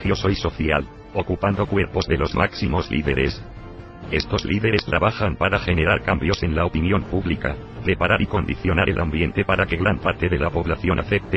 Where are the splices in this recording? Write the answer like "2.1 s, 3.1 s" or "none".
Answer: 9.9 s